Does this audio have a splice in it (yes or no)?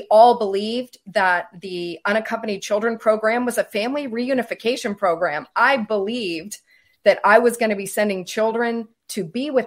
no